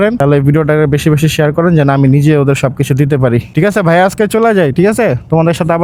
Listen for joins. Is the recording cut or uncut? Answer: uncut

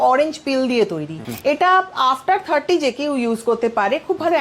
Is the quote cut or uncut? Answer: cut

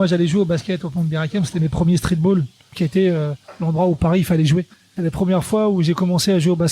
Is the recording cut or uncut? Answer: cut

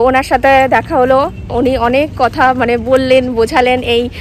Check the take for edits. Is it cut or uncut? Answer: uncut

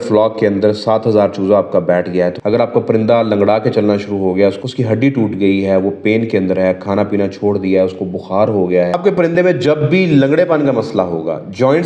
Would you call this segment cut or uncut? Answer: cut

